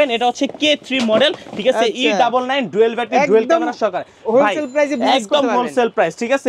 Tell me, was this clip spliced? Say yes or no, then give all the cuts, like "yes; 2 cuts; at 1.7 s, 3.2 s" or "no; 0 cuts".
no; 0 cuts